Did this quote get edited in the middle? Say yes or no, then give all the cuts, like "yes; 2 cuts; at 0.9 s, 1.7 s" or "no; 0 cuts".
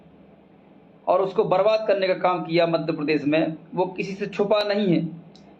no; 0 cuts